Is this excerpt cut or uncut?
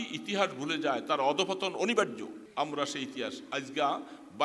cut